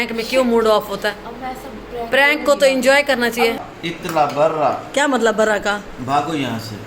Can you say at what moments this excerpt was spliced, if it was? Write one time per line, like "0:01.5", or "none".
0:03.7